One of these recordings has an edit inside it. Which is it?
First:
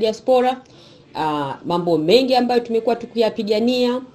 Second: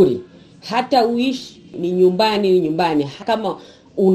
second; 2 cuts; at 1.7 s, 3.2 s

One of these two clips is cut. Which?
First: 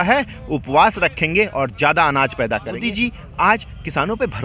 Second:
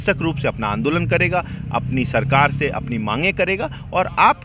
first; 1 cut; at 2.8 s

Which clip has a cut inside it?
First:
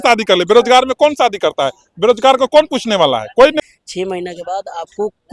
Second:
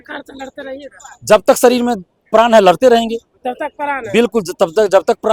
first; 1 cut; at 3.6 s

